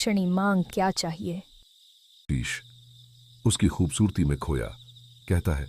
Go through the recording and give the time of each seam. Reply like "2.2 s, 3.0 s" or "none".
2.2 s